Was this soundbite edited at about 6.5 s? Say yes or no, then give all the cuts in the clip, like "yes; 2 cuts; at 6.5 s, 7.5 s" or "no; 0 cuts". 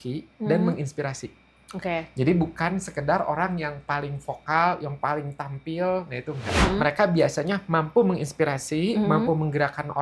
yes; 1 cut; at 6.5 s